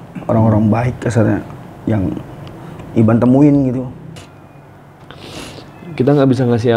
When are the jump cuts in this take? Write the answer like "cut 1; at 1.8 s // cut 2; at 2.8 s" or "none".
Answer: cut 1; at 4.1 s